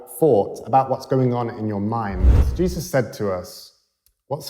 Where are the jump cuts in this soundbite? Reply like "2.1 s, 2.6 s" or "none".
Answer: 2.4 s